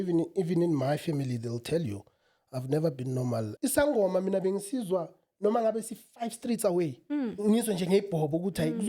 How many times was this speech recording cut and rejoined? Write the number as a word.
one